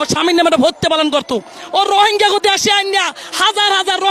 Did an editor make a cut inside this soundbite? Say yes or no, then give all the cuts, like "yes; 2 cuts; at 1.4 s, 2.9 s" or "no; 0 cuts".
yes; 1 cut; at 1.5 s